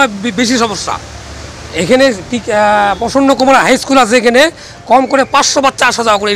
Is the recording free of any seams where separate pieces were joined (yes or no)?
yes